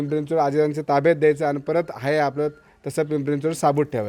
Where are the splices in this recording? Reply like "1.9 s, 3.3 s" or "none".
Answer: none